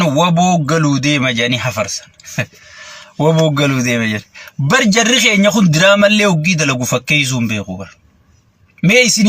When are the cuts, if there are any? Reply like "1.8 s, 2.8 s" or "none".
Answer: none